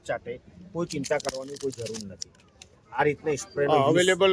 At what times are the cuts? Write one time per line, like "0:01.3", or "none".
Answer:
none

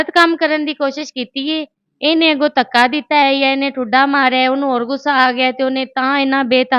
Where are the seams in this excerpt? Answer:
none

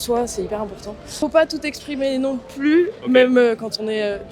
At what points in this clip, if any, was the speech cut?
0:01.2

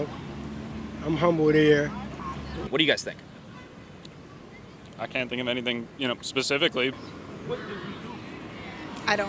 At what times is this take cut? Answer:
none

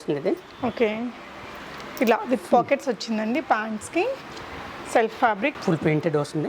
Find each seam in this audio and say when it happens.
0:05.5

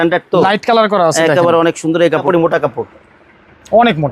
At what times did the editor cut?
0:02.2

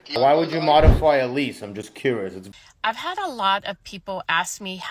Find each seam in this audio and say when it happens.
0:02.4

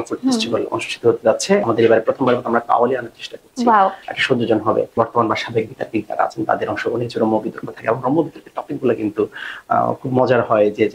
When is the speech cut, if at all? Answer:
0:01.6
0:04.9

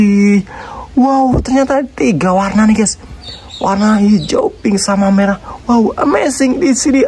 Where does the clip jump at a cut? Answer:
none

